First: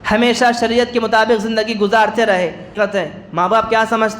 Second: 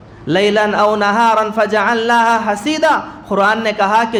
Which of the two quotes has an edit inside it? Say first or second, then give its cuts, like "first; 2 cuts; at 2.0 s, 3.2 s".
first; 1 cut; at 2.7 s